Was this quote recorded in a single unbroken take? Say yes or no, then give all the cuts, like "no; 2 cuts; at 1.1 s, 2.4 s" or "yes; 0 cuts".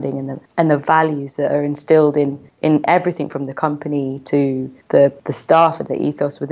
no; 1 cut; at 5.0 s